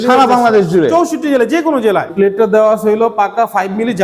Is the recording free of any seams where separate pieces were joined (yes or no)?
no